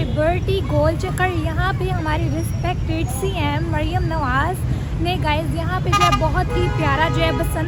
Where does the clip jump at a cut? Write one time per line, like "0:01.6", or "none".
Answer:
none